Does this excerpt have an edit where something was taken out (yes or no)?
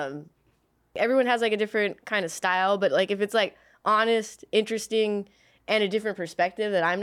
yes